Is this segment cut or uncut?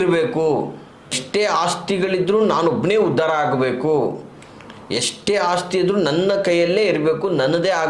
cut